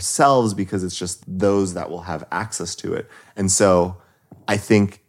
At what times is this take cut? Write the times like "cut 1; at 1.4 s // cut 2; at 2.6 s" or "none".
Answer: cut 1; at 1.1 s